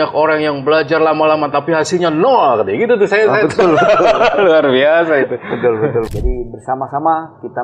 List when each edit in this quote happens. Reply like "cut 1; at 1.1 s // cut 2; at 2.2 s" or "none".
cut 1; at 6.1 s